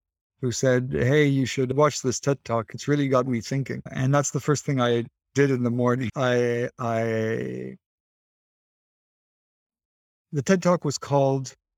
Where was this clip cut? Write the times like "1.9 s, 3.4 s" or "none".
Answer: none